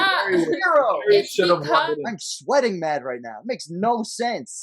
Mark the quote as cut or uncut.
cut